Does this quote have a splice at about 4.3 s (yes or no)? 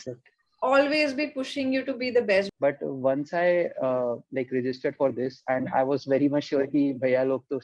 no